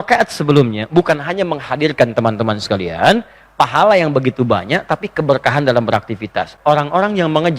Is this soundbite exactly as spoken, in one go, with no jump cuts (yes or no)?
no